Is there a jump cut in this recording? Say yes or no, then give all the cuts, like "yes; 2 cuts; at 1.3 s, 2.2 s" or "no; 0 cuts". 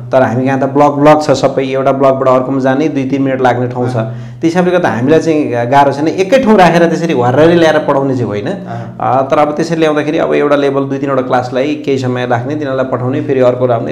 no; 0 cuts